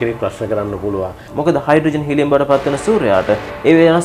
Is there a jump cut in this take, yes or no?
yes